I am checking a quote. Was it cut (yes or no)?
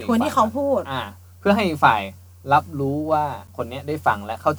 yes